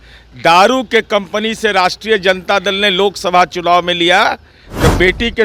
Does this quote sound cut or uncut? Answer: uncut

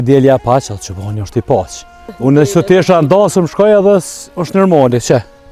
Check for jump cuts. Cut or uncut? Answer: cut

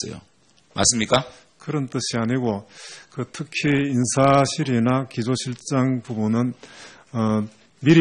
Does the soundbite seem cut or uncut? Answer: uncut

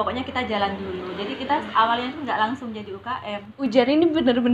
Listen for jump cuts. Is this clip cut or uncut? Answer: cut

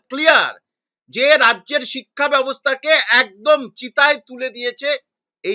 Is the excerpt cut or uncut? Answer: uncut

